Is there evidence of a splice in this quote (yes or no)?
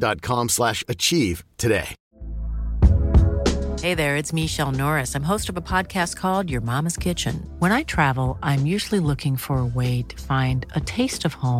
yes